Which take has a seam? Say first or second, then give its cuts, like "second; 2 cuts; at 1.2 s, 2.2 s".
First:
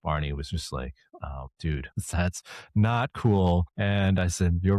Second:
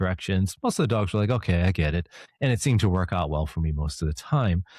first; 1 cut; at 1.5 s